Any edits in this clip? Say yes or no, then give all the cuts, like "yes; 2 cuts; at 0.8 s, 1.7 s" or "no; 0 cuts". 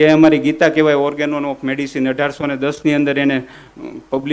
no; 0 cuts